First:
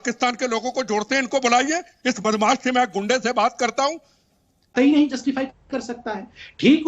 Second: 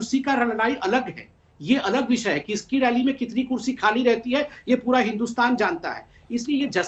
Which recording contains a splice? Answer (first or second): first